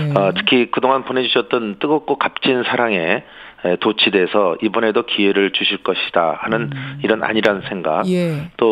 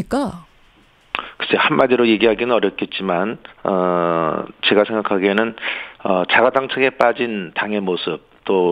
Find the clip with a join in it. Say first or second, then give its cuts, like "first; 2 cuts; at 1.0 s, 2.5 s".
second; 1 cut; at 6.7 s